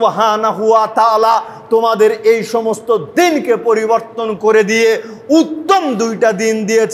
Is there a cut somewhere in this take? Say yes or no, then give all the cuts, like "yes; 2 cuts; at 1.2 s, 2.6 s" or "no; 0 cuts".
no; 0 cuts